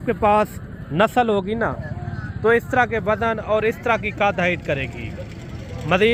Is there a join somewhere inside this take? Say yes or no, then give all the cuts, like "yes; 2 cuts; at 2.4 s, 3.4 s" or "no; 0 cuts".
no; 0 cuts